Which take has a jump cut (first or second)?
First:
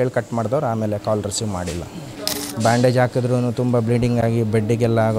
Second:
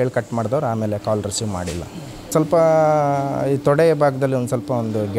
first